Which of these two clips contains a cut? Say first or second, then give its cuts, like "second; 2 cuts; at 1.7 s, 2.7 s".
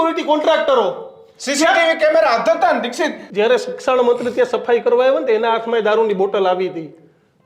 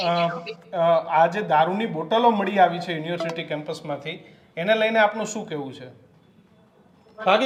first; 1 cut; at 3.2 s